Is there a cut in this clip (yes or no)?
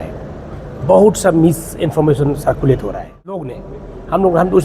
yes